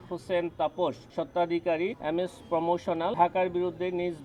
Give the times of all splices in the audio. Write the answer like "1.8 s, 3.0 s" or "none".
1.0 s, 2.0 s, 3.1 s